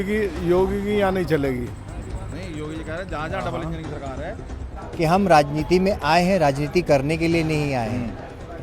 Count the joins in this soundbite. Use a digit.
1